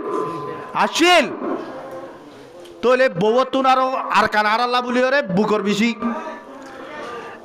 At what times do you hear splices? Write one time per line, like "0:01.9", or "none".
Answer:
none